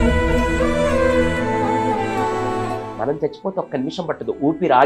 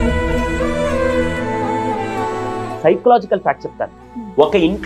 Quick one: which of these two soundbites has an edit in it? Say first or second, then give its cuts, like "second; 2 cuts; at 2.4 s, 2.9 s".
second; 1 cut; at 2.7 s